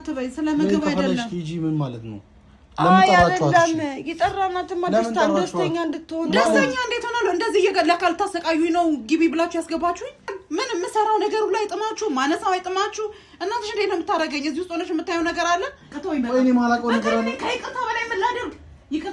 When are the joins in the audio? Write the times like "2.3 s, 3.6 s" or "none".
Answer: 10.3 s, 15.9 s